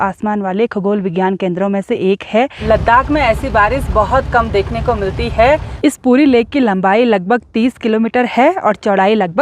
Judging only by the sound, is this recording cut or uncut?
cut